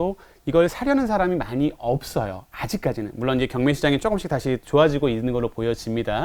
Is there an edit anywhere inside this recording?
no; 0 cuts

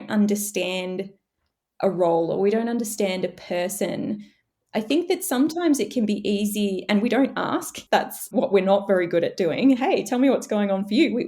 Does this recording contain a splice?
no; 0 cuts

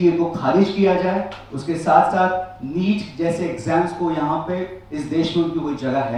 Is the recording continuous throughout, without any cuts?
yes; 0 cuts

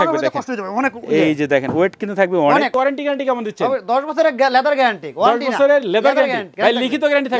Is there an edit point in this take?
yes; 2 cuts; at 2.7 s, 6.5 s

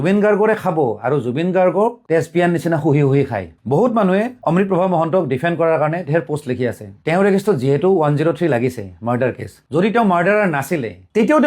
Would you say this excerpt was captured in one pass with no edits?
no; 3 cuts; at 3.5 s, 7.0 s, 9.6 s

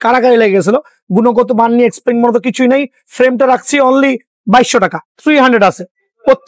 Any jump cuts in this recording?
yes; 1 cut; at 5.1 s

